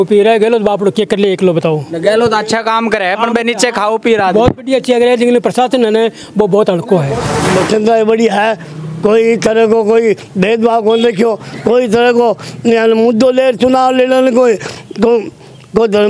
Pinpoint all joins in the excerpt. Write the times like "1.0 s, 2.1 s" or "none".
7.5 s